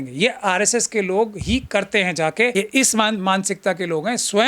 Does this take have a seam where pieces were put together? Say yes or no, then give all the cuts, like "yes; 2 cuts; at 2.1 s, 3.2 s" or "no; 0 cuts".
yes; 1 cut; at 2.5 s